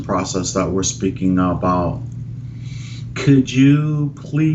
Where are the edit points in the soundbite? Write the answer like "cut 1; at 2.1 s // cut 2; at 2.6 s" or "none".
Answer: none